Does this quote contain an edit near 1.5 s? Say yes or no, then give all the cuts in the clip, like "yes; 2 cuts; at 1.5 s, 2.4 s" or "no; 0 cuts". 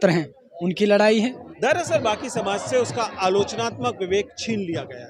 yes; 1 cut; at 1.5 s